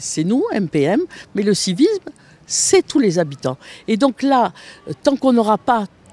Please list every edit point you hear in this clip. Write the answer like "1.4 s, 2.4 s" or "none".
none